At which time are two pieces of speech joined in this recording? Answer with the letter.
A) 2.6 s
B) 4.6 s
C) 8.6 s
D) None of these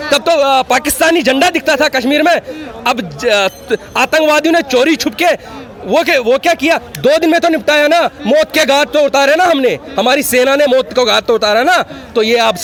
D